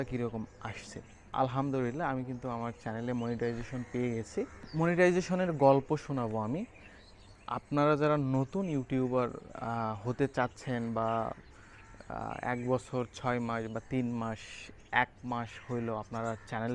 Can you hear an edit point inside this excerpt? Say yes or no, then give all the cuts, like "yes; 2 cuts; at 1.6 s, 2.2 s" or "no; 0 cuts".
yes; 2 cuts; at 1.3 s, 4.7 s